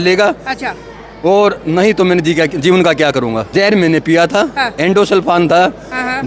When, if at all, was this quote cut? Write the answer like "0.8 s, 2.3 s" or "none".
3.5 s

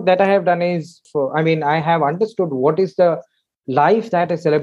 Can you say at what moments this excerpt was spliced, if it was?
1.0 s

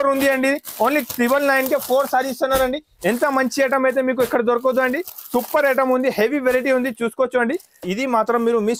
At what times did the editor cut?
7.8 s

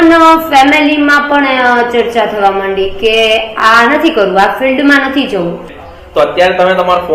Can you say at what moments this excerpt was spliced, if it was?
5.7 s

